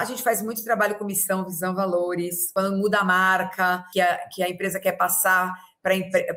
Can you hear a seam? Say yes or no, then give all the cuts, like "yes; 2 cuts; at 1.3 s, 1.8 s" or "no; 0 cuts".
yes; 2 cuts; at 2.5 s, 3.8 s